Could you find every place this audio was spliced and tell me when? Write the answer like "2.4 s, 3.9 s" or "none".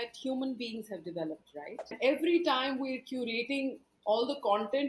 1.9 s